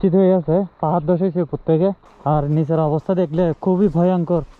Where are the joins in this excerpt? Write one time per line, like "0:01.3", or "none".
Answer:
0:02.1

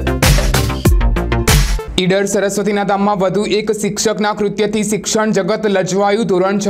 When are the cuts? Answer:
none

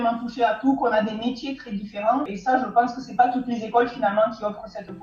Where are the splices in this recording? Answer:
0:02.3

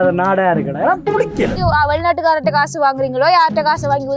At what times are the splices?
0:01.6

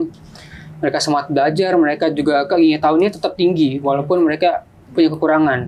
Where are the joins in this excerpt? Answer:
none

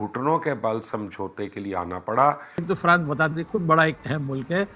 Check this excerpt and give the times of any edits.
0:02.6

